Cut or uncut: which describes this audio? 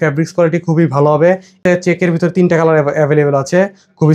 cut